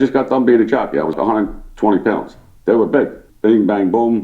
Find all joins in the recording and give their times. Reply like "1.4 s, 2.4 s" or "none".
3.2 s